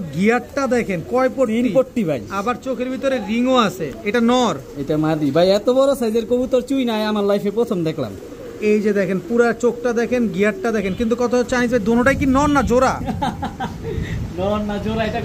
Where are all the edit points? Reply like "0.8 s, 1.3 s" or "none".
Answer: none

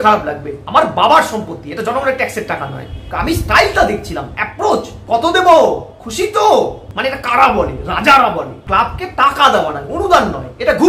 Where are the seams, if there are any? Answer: 3.0 s, 8.6 s

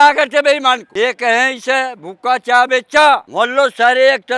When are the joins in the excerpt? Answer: 0.9 s, 3.3 s

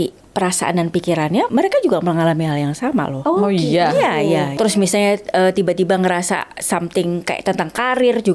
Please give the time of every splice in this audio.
1.5 s, 3.1 s, 4.5 s

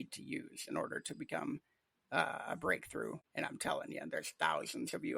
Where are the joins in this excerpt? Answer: 3.2 s

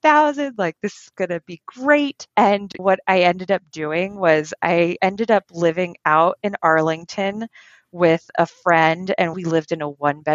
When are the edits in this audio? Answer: 9.4 s

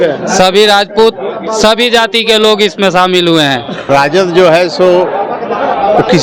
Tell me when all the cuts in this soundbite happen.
3.9 s

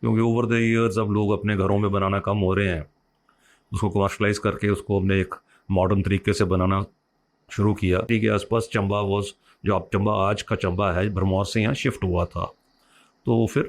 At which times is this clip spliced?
8.1 s

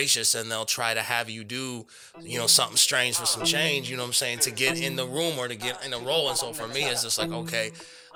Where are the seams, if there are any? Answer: none

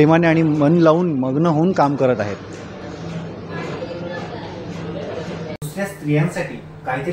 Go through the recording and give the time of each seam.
5.7 s

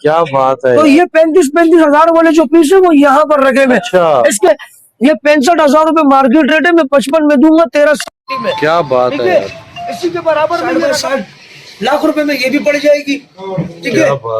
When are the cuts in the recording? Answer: 4.5 s, 10.9 s

